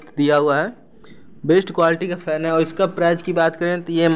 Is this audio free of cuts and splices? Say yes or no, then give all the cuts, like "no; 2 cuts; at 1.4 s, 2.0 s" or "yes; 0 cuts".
yes; 0 cuts